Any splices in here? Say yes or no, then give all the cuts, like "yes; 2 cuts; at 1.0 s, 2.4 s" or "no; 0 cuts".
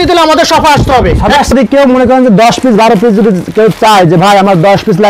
yes; 1 cut; at 1.5 s